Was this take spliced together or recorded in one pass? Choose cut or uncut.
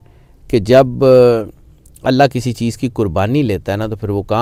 uncut